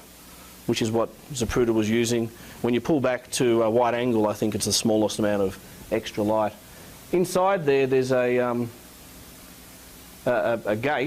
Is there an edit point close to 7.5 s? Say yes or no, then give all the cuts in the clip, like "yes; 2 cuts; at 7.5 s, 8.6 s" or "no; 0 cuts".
no; 1 cut; at 2.8 s